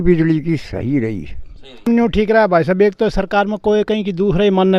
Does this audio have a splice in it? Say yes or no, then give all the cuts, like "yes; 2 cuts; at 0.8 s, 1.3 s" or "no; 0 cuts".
yes; 1 cut; at 1.9 s